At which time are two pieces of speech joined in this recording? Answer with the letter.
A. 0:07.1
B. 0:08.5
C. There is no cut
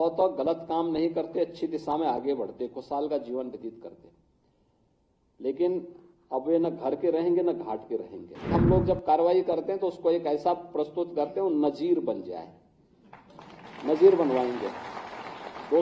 B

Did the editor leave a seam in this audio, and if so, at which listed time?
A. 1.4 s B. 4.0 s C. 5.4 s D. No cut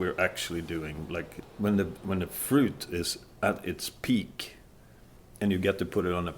A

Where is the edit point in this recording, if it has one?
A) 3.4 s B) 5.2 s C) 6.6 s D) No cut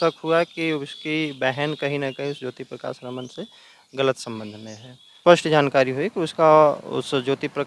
B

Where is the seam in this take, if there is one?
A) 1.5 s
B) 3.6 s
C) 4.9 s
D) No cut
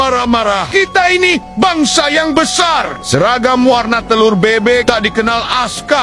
D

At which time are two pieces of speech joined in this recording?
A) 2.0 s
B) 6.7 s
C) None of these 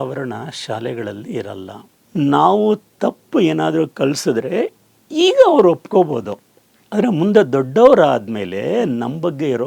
A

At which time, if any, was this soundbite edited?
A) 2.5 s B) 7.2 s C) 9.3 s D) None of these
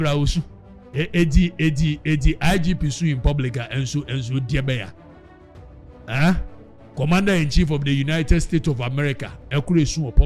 C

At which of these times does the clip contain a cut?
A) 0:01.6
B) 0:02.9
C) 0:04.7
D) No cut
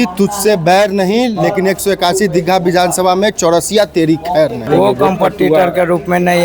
C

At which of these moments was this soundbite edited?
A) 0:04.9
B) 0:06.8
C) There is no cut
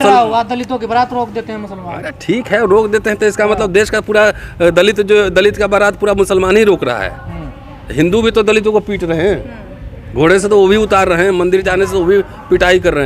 C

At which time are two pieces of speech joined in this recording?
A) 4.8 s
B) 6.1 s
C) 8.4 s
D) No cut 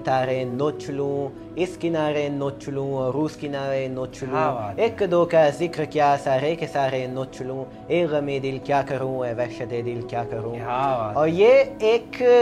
D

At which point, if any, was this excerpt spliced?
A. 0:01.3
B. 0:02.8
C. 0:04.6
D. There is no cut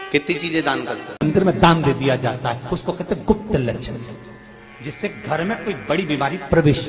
A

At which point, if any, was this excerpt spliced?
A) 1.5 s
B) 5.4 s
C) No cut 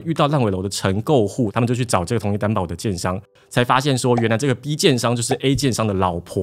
A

